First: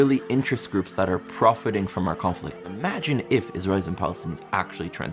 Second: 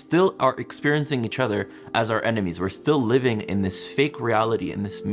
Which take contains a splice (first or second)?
first